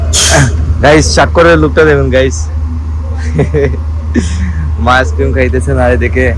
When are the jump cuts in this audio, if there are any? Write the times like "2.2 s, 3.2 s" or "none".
none